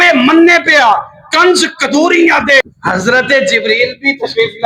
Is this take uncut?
no; 1 cut; at 2.6 s

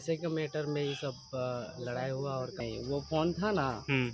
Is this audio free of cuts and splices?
no; 1 cut; at 2.6 s

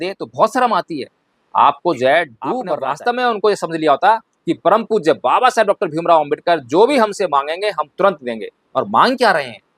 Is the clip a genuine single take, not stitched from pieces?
no; 1 cut; at 2.7 s

